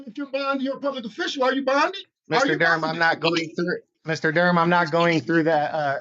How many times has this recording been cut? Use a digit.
2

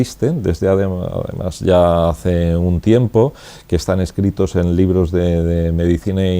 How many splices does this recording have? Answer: 1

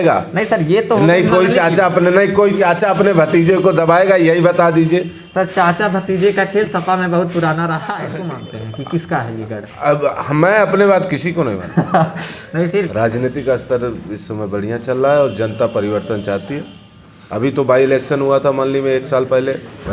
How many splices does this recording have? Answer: 2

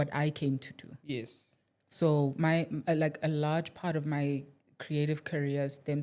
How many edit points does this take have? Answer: 0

